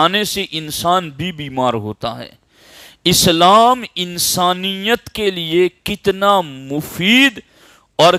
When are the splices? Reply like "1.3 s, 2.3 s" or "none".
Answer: none